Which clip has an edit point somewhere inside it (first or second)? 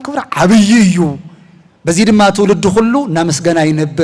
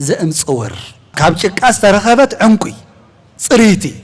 second